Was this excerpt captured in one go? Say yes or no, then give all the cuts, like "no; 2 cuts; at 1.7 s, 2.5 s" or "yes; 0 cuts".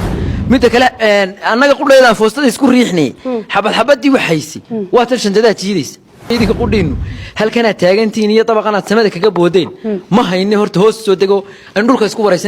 no; 1 cut; at 6.3 s